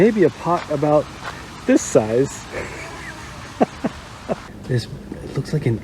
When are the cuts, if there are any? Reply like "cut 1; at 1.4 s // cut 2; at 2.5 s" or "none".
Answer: cut 1; at 4.5 s